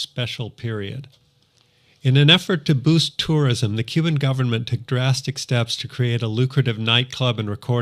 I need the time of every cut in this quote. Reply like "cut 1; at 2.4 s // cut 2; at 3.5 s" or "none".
none